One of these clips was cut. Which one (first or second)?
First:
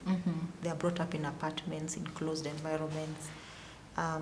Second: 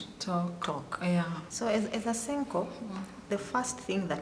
second